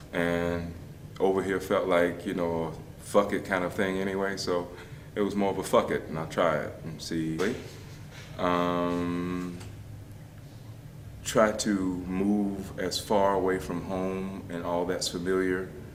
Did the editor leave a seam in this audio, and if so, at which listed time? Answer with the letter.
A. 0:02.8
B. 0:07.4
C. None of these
C